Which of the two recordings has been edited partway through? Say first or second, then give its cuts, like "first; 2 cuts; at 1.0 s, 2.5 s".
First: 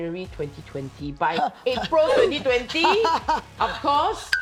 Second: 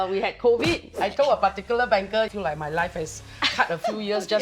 second; 2 cuts; at 0.9 s, 2.3 s